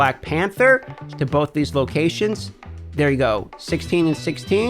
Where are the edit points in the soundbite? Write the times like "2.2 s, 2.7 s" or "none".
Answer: 1.0 s